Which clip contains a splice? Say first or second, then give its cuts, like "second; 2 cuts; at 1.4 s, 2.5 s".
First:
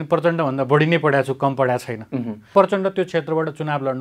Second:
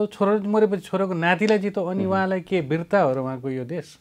first; 1 cut; at 2.4 s